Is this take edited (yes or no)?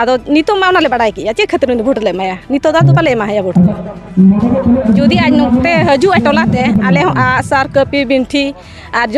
no